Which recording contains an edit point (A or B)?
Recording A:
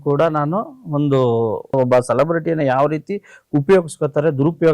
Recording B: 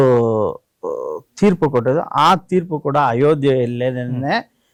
A